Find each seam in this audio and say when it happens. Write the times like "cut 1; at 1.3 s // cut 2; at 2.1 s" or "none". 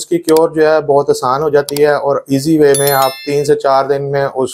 none

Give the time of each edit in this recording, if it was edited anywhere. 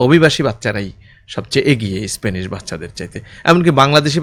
none

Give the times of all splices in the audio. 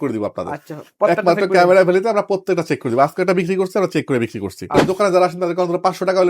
cut 1; at 4.8 s

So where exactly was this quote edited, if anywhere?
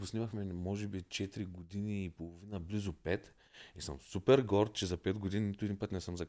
none

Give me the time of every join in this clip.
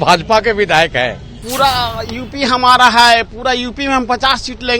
cut 1; at 1.5 s

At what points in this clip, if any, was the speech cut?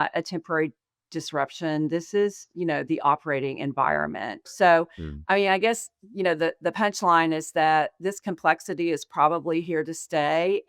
cut 1; at 4.5 s

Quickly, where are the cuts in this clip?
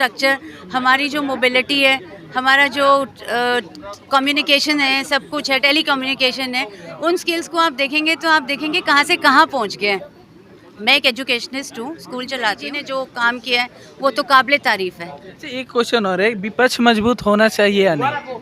cut 1; at 12.7 s

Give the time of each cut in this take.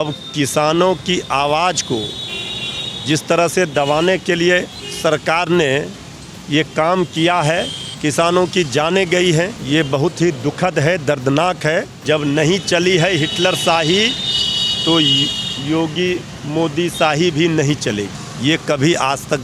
cut 1; at 4.8 s // cut 2; at 7.8 s // cut 3; at 9.6 s // cut 4; at 11.9 s // cut 5; at 18.1 s

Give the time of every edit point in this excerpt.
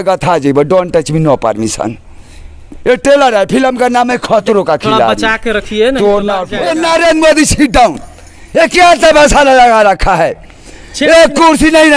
cut 1; at 6.5 s

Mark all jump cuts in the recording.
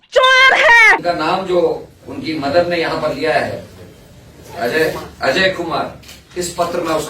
cut 1; at 1.0 s

